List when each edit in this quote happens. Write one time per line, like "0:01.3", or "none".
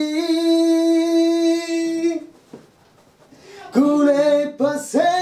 none